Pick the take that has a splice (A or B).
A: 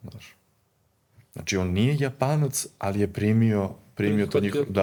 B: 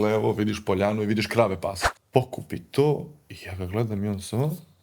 B